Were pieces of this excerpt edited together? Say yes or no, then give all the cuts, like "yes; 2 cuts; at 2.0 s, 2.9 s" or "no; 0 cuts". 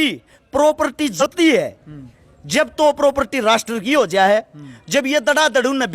yes; 1 cut; at 1.2 s